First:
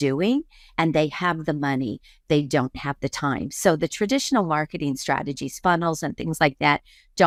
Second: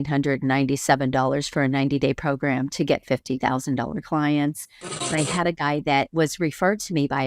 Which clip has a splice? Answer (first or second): second